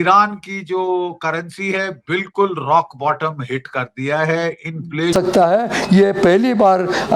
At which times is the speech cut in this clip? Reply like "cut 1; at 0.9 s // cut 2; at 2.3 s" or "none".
cut 1; at 5.1 s